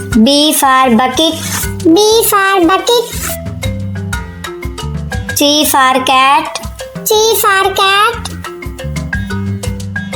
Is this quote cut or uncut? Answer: uncut